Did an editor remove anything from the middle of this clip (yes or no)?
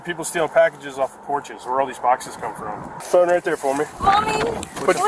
yes